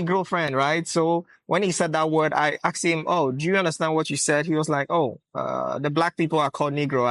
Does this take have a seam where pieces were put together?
no; 0 cuts

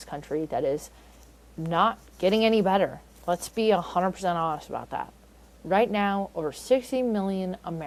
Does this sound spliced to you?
no; 0 cuts

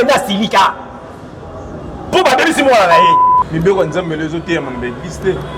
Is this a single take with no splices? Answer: no; 1 cut; at 3.3 s

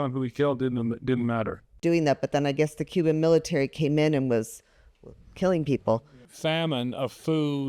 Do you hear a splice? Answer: yes; 2 cuts; at 1.8 s, 6.2 s

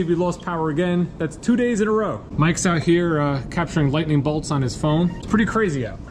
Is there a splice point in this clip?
yes; 2 cuts; at 2.2 s, 5.2 s

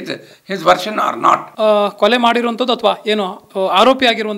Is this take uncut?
no; 1 cut; at 1.5 s

